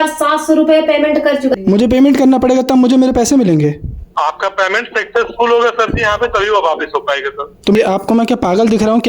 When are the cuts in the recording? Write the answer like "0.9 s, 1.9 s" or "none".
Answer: 1.5 s, 7.8 s

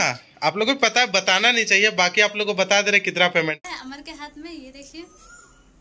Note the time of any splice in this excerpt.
3.6 s

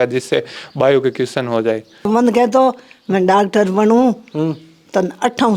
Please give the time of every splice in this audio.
2.1 s

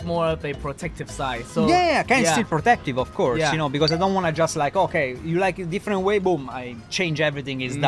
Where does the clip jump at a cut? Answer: none

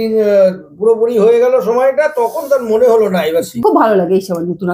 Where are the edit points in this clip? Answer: 3.6 s

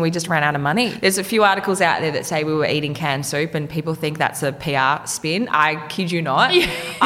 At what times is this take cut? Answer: 0.9 s

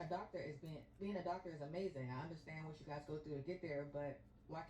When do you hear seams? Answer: 1.3 s

